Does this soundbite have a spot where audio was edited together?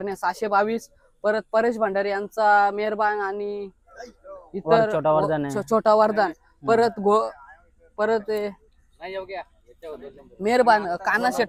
no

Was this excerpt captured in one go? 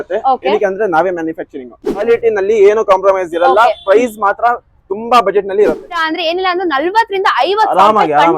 no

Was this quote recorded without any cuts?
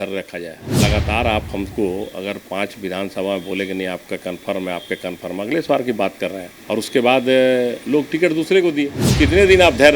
no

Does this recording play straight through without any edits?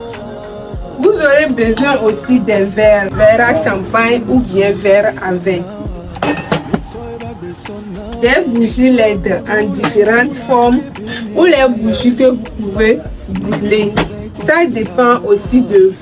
no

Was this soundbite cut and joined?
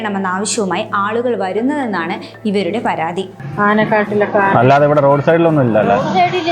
yes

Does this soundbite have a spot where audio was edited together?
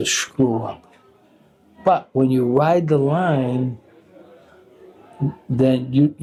no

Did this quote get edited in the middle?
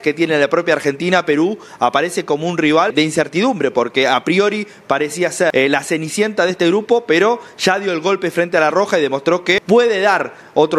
yes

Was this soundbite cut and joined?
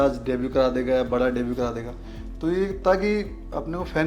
no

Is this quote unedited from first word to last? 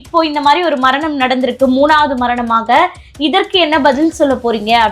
yes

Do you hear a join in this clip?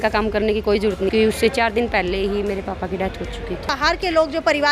yes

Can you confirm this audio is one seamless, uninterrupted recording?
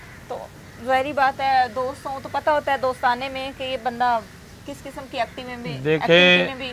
yes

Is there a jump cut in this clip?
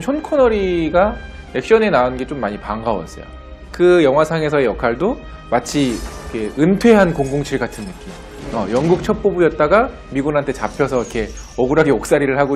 no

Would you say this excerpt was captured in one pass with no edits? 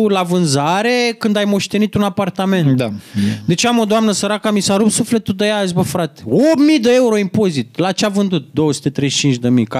yes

